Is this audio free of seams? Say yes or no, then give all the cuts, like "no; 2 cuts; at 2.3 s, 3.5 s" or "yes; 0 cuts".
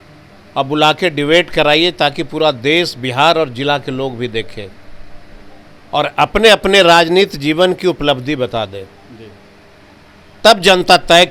yes; 0 cuts